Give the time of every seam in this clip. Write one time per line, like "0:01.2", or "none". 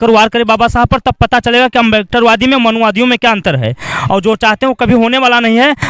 none

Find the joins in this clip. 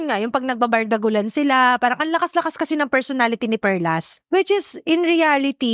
0:04.2

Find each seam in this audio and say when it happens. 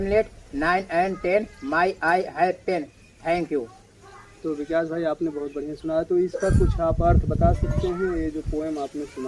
none

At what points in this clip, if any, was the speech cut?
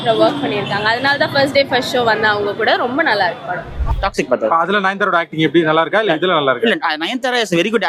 0:03.8

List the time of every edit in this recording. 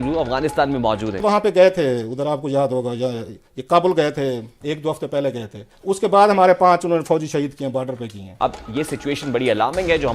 0:01.2
0:08.2

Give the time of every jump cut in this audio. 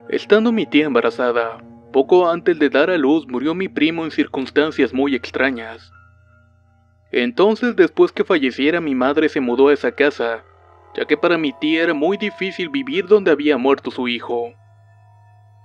0:14.7

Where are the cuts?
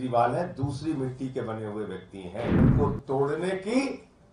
0:02.6

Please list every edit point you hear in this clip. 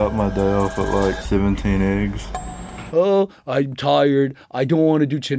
0:02.8

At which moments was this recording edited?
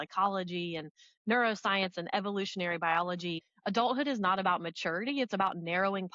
0:03.5

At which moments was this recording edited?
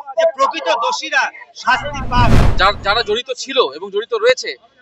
0:02.5

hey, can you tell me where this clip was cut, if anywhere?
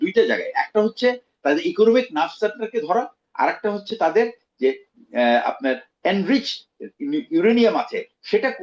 none

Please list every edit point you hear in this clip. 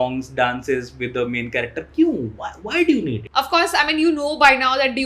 0:03.2

